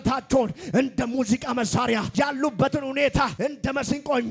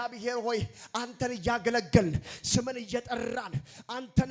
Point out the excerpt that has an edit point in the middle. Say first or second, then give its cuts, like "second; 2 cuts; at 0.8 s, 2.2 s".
first; 2 cuts; at 2.1 s, 3.3 s